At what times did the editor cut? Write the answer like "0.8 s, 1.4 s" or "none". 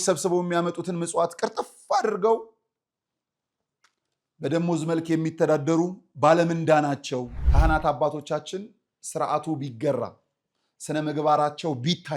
7.4 s